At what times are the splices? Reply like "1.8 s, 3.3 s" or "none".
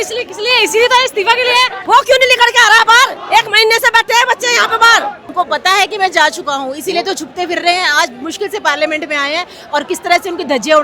1.8 s, 5.2 s